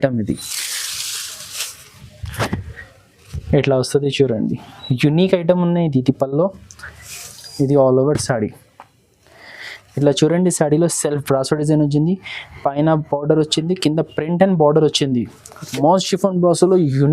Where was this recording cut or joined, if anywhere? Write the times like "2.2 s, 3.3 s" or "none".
15.8 s